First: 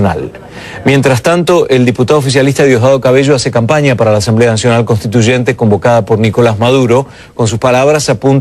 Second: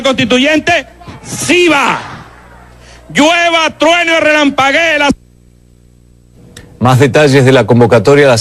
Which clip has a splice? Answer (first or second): first